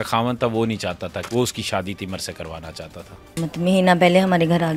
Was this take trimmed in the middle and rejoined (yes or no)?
yes